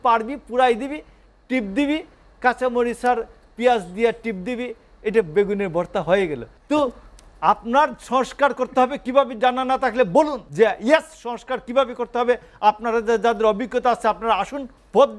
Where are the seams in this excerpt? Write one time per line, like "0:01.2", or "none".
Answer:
0:06.5
0:10.4